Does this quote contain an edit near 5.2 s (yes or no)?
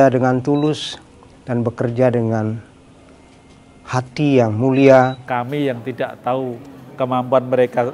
yes